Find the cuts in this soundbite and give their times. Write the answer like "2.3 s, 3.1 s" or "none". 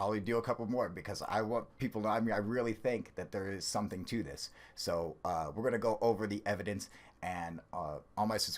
5.2 s